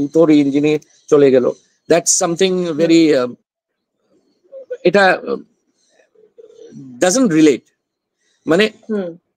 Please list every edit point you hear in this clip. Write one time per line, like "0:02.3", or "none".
none